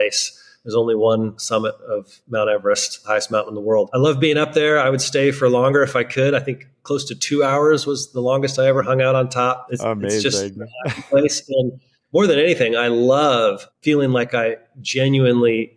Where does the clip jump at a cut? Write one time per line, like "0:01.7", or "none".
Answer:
0:01.4
0:03.9